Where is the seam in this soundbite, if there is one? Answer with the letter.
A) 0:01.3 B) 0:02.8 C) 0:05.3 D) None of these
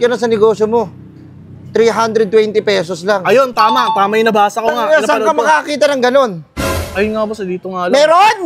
D